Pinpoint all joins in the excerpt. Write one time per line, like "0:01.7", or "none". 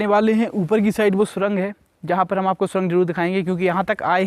none